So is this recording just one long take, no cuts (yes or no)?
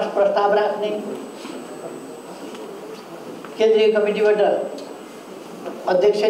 yes